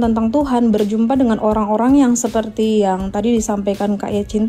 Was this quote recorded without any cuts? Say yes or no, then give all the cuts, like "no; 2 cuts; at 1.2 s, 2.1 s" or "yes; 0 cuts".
yes; 0 cuts